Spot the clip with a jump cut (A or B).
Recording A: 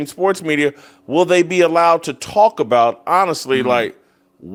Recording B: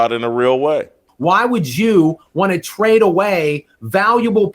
B